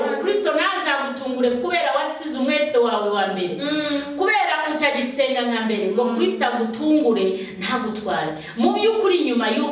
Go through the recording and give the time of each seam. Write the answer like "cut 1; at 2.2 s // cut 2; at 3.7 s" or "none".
none